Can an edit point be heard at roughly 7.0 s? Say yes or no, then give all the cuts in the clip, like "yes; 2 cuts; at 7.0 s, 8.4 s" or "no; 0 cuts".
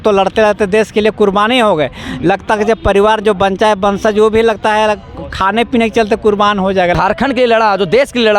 yes; 1 cut; at 7.0 s